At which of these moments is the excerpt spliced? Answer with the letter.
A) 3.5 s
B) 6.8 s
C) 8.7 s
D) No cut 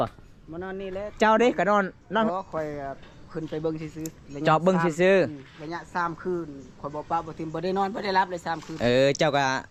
D